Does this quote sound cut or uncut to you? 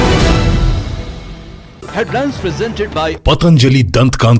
cut